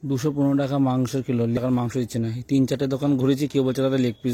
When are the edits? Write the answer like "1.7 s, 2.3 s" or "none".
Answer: 1.6 s